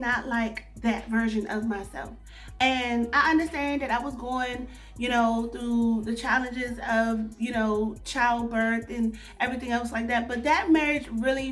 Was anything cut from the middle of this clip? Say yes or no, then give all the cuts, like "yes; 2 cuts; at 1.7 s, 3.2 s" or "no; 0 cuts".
no; 0 cuts